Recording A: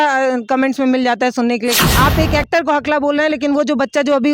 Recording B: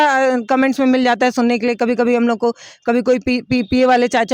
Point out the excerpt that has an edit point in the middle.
A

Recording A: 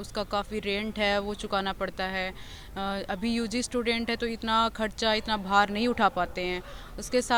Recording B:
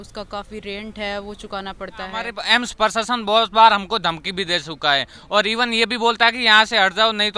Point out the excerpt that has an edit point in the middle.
B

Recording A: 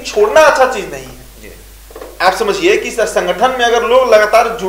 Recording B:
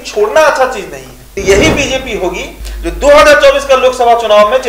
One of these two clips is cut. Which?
B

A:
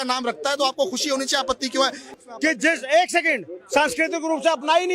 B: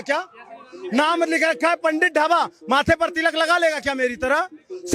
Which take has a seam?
A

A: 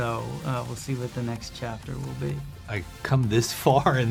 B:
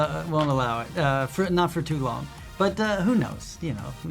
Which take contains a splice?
A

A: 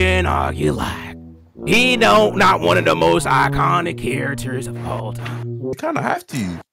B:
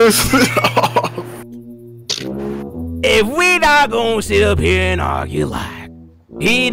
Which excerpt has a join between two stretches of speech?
A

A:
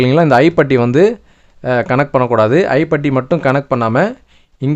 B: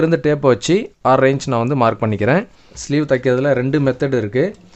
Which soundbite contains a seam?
B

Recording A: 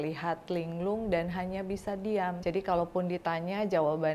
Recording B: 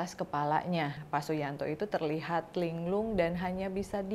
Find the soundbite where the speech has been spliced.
B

